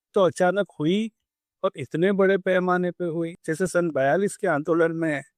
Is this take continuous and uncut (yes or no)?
no